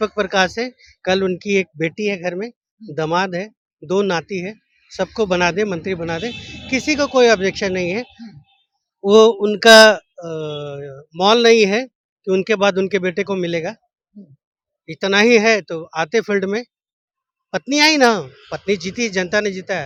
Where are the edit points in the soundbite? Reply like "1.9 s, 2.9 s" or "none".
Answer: none